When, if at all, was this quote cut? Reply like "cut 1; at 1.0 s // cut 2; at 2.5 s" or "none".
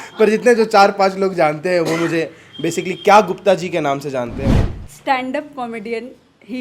cut 1; at 4.5 s